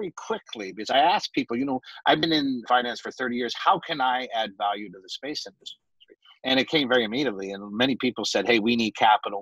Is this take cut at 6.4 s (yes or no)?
no